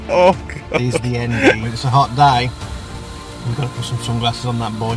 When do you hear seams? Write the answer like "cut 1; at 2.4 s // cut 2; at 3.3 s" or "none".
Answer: cut 1; at 1.7 s